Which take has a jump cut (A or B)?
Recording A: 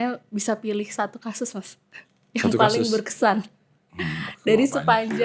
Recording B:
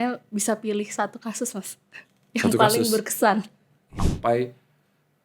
B